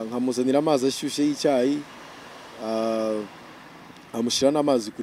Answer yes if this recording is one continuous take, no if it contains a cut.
yes